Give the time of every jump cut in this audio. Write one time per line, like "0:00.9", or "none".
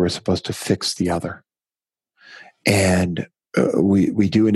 0:03.3